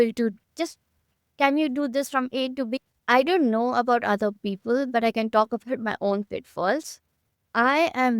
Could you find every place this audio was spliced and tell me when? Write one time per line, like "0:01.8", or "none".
0:02.8